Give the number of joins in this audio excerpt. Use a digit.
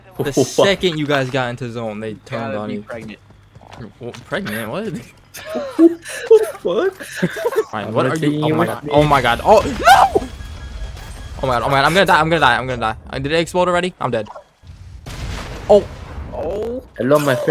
1